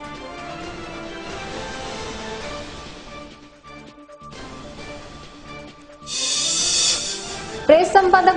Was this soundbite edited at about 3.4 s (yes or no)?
no